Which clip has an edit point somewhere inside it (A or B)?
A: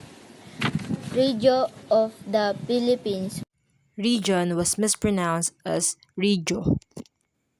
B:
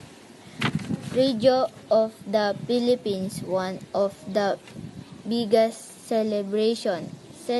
B